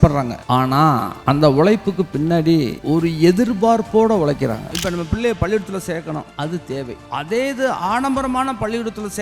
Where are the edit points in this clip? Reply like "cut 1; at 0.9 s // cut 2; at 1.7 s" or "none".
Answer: cut 1; at 0.8 s // cut 2; at 2.8 s // cut 3; at 4.8 s // cut 4; at 6.6 s